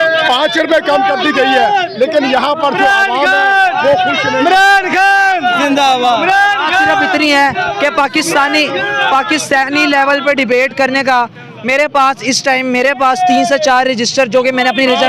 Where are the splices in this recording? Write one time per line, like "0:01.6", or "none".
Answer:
none